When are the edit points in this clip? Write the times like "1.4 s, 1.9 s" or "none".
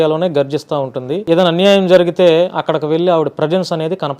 1.1 s